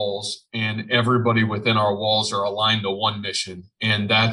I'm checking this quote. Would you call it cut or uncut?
uncut